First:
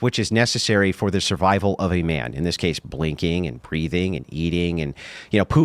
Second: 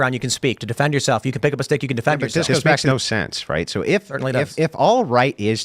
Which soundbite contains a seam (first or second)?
second